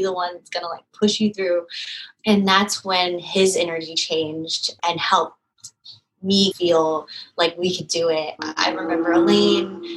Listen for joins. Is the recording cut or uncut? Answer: cut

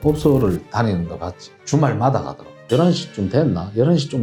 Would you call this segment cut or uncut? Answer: cut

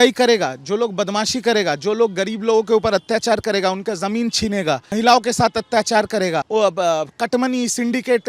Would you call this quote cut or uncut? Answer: cut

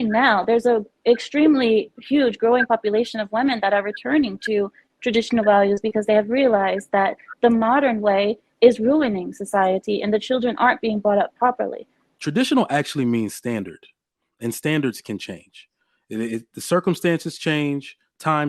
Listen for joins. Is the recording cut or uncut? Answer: cut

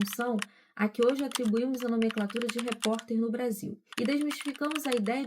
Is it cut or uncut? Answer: cut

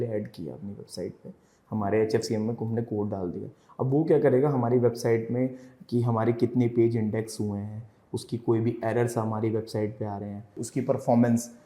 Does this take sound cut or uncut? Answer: cut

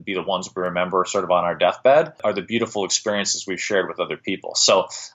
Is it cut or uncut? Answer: cut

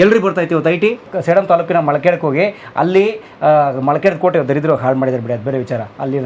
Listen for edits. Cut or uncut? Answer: cut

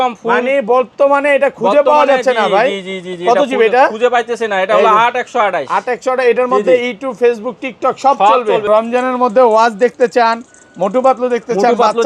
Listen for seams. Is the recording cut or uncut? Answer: cut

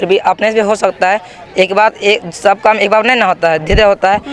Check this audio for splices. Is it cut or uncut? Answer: uncut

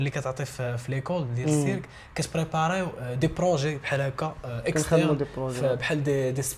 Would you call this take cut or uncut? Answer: uncut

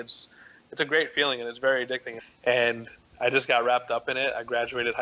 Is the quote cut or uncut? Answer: cut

